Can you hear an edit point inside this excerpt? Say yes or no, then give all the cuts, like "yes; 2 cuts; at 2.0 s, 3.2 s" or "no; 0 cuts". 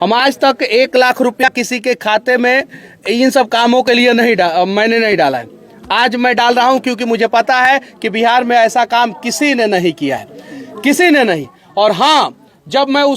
yes; 1 cut; at 1.5 s